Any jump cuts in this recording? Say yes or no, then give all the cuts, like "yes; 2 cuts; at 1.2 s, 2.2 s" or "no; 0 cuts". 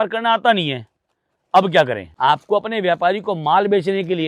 yes; 1 cut; at 2.0 s